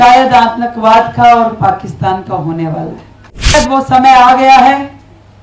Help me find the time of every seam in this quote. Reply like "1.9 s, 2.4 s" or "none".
3.5 s